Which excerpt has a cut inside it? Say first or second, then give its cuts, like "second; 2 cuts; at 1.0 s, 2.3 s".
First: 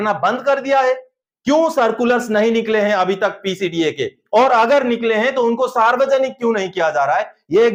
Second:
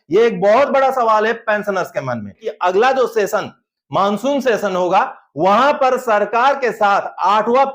second; 1 cut; at 2.5 s